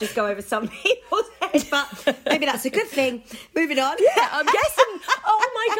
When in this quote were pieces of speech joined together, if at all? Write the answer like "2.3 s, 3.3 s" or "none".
none